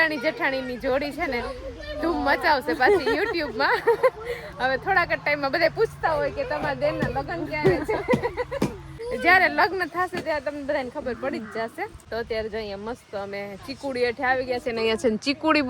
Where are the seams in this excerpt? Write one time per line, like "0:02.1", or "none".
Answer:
none